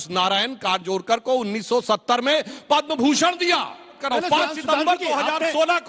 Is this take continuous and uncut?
no; 1 cut; at 4.0 s

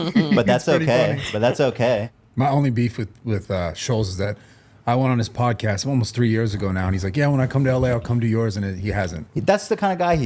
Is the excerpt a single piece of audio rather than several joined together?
no; 1 cut; at 2.2 s

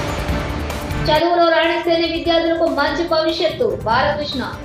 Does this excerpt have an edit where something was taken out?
no; 0 cuts

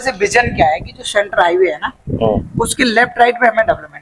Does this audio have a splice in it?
no; 0 cuts

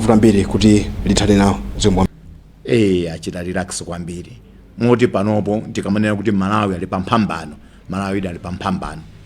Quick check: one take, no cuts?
no; 1 cut; at 2.1 s

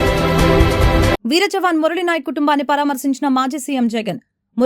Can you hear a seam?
no; 0 cuts

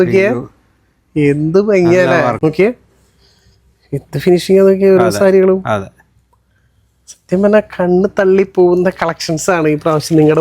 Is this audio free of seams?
no; 1 cut; at 2.4 s

